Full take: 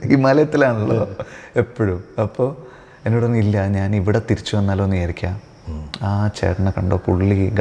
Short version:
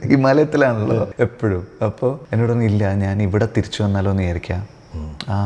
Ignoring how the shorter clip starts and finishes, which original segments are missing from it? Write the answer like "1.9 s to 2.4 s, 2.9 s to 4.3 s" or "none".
1.1 s to 1.5 s, 2.6 s to 3.0 s